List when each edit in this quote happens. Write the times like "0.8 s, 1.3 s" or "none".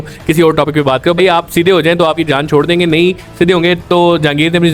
none